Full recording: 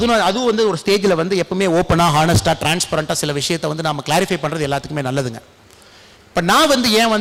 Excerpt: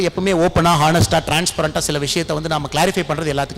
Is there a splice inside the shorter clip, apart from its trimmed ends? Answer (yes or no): no